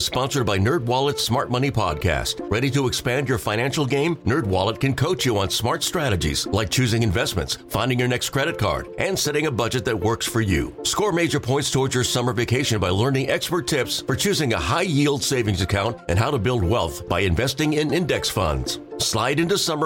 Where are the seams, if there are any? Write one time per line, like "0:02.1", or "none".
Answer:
none